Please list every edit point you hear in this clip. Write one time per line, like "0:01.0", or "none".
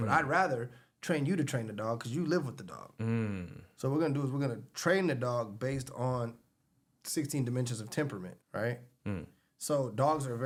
none

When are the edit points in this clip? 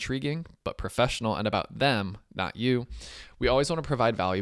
none

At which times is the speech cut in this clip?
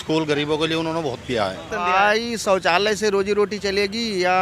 0:01.7

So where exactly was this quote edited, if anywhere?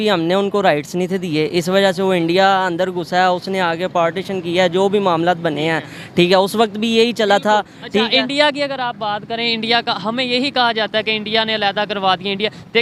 none

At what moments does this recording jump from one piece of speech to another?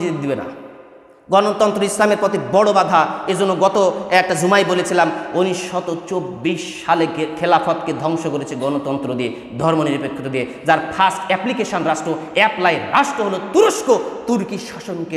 none

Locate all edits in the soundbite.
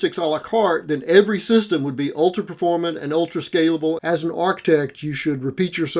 0:04.0

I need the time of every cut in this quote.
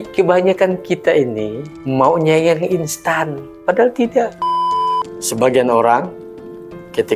0:04.8

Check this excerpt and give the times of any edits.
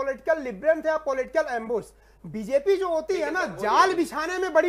none

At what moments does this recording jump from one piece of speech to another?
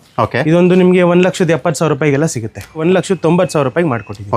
0:02.8

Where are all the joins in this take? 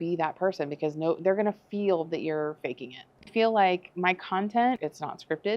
0:03.3
0:04.8

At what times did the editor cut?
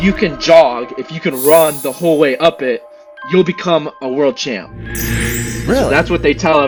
none

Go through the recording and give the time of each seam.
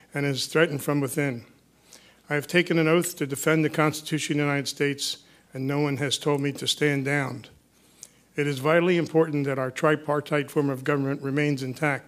none

